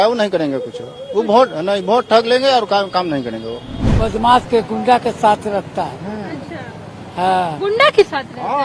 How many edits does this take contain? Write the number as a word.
one